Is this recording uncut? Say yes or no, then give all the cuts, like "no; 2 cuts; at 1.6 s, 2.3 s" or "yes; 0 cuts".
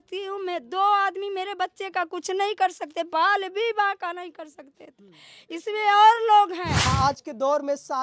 no; 1 cut; at 6.8 s